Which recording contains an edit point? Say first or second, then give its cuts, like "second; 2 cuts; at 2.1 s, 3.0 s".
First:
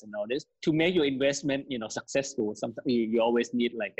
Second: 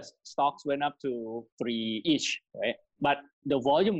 second; 1 cut; at 2.0 s